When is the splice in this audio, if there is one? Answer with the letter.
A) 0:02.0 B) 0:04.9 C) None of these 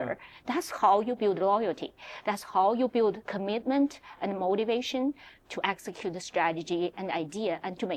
C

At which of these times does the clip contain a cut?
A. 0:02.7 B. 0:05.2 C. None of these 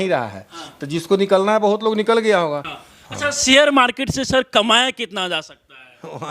A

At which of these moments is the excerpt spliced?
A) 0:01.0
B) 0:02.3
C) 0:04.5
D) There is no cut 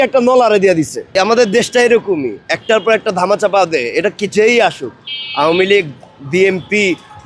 D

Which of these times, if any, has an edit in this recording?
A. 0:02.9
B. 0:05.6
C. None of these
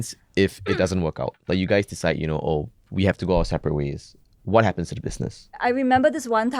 B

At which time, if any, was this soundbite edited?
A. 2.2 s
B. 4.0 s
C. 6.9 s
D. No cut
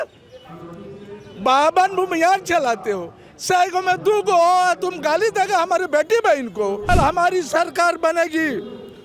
C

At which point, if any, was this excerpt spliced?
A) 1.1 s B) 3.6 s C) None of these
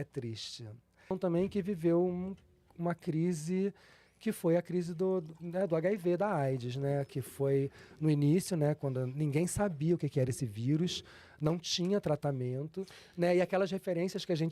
A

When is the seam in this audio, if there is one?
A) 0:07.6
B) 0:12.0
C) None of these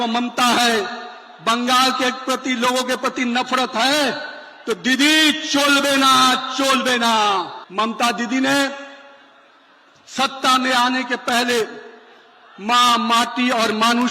A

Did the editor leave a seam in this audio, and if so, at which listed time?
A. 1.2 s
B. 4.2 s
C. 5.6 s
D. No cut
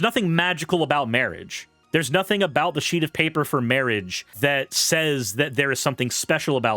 B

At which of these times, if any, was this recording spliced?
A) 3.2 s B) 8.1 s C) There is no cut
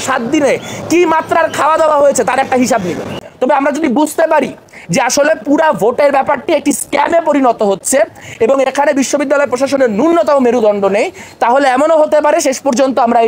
A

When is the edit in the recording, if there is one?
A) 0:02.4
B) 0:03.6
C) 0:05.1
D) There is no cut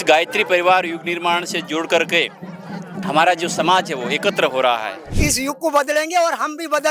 C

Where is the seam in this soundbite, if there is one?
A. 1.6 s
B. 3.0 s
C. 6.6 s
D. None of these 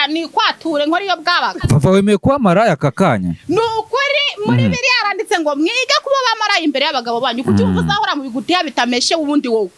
A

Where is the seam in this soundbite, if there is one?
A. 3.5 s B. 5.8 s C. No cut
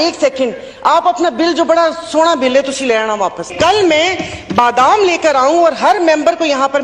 A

